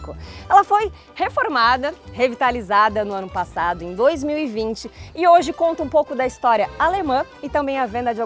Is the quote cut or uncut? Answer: uncut